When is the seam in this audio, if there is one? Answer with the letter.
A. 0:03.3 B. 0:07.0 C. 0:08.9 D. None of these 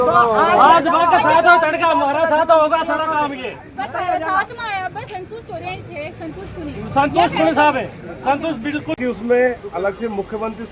C